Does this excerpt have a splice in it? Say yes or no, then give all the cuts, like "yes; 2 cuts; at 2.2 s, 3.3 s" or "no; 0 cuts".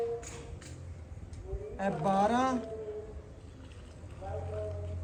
no; 0 cuts